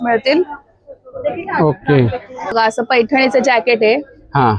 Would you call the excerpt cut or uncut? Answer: cut